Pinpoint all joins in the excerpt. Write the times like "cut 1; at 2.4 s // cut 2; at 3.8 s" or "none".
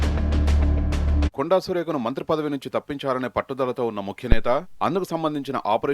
cut 1; at 1.0 s